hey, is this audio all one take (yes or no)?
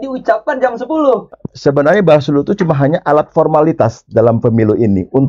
no